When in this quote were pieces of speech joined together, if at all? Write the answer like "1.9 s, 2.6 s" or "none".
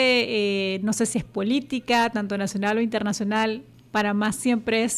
3.7 s